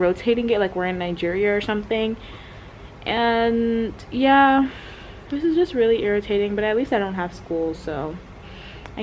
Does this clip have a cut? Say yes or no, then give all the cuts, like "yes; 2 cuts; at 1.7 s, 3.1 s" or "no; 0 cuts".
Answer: no; 0 cuts